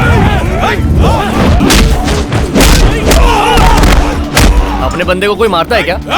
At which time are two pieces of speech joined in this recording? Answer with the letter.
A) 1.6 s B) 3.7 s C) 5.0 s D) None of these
A